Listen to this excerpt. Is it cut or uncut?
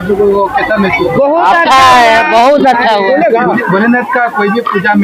cut